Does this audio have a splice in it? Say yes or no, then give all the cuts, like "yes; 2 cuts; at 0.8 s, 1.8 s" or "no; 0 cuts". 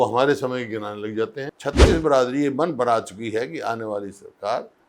yes; 1 cut; at 1.5 s